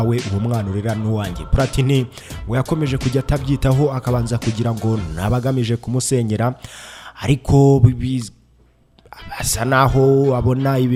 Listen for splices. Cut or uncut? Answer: uncut